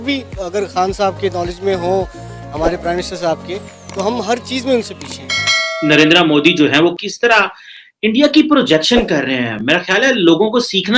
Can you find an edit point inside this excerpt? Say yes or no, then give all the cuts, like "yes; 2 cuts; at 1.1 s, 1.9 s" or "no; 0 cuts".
yes; 2 cuts; at 5.5 s, 7.0 s